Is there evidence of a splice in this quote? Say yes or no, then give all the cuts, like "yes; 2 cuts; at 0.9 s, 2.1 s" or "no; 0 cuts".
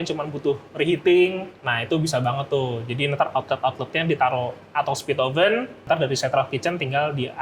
yes; 2 cuts; at 1.5 s, 5.8 s